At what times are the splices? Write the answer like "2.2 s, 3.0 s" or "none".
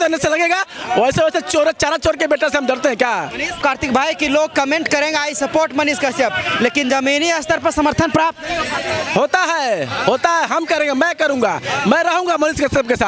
3.6 s